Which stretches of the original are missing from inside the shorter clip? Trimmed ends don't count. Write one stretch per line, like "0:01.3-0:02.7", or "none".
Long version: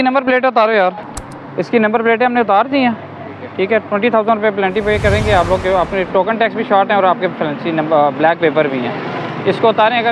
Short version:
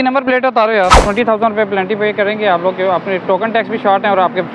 0:01.0-0:03.9